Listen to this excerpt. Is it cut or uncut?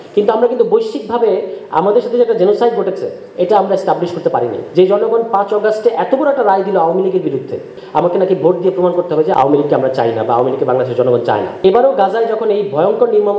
cut